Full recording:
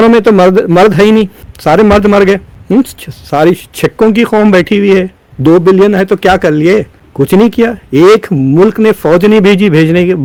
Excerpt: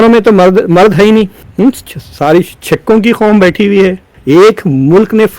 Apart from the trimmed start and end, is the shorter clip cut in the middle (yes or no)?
yes